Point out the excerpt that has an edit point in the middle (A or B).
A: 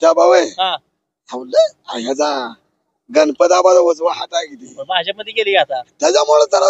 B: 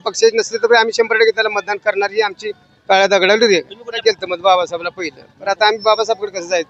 B